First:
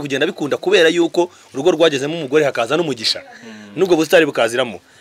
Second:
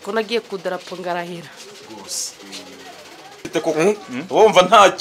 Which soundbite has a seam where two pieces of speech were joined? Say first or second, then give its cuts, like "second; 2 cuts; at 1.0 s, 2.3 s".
second; 1 cut; at 3.4 s